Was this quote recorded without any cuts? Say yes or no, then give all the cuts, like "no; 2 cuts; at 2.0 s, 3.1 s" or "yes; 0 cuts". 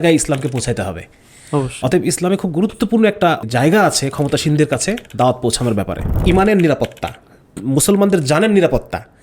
no; 2 cuts; at 3.4 s, 6.1 s